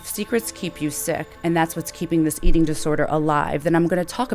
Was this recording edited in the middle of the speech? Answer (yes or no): yes